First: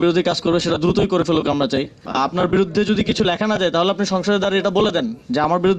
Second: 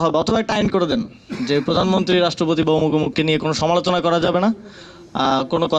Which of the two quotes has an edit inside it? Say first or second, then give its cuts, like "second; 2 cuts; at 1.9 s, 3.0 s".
first; 1 cut; at 2.0 s